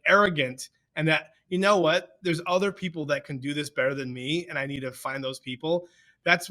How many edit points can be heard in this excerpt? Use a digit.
0